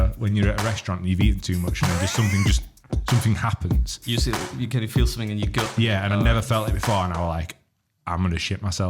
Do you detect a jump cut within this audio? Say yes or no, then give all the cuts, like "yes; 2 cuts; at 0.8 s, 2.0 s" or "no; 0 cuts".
no; 0 cuts